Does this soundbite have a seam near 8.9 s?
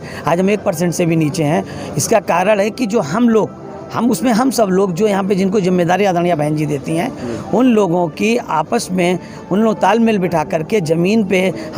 no; 0 cuts

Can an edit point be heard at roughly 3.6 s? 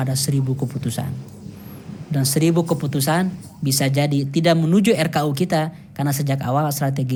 no; 0 cuts

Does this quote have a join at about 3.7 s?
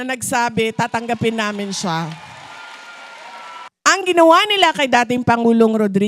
yes; 1 cut; at 3.7 s

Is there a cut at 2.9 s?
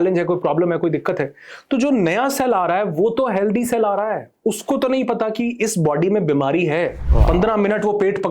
no; 1 cut; at 7.0 s

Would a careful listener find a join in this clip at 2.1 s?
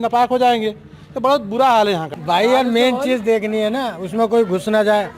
yes; 1 cut; at 2.1 s

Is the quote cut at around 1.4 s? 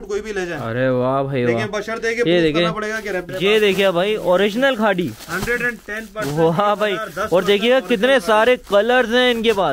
no; 1 cut; at 3.3 s

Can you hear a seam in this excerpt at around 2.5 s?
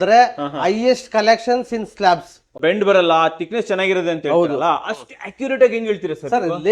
yes; 1 cut; at 2.5 s

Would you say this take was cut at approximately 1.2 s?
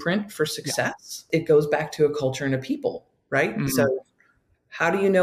yes; 1 cut; at 1.2 s

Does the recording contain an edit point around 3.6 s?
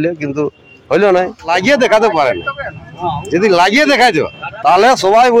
no; 1 cut; at 1.5 s

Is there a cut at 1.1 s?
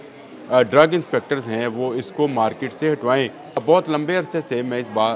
no; 1 cut; at 3.6 s

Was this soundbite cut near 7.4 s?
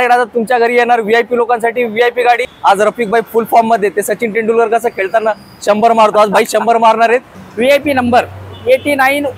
yes; 2 cuts; at 2.5 s, 7.4 s

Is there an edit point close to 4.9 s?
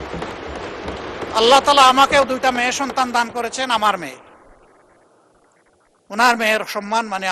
no; 0 cuts

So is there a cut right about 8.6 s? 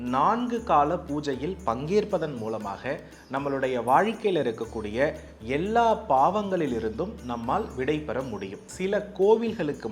yes; 1 cut; at 8.6 s

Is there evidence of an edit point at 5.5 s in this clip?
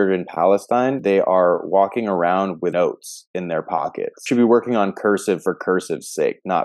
no; 3 cuts; at 1.0 s, 2.7 s, 4.2 s

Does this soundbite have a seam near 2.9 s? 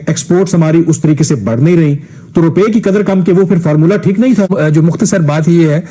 no; 1 cut; at 4.5 s

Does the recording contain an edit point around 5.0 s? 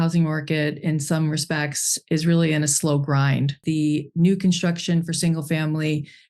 no; 1 cut; at 3.6 s

